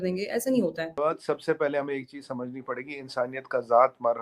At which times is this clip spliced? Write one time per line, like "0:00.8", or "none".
0:00.9